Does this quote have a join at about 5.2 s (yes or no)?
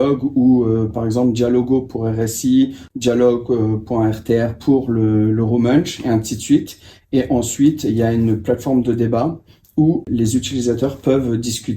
no